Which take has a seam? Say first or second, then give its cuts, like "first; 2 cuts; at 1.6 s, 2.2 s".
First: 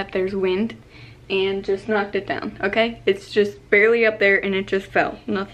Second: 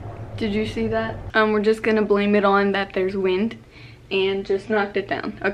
second; 1 cut; at 1.3 s